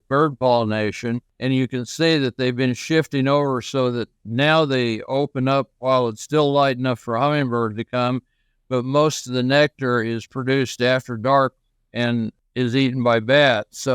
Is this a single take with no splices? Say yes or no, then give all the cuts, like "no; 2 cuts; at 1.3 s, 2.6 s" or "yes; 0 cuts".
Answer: no; 2 cuts; at 1.3 s, 12.4 s